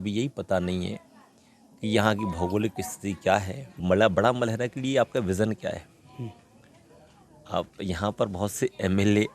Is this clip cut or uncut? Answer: cut